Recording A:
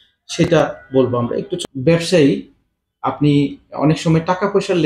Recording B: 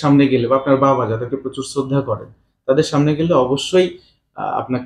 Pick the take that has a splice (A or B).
A